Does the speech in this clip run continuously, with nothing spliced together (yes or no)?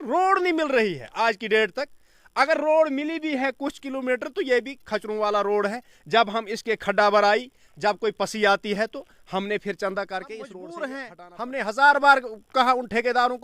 no